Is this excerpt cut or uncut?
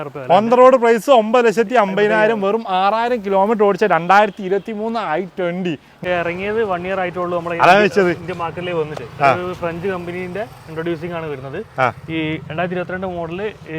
cut